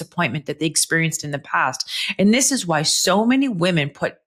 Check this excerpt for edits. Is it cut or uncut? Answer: uncut